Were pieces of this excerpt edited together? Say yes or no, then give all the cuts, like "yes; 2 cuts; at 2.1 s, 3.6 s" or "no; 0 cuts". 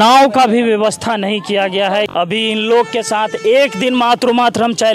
yes; 1 cut; at 2.1 s